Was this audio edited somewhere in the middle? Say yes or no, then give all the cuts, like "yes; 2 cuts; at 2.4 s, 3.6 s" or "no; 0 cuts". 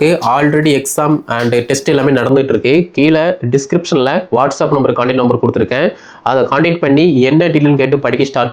no; 0 cuts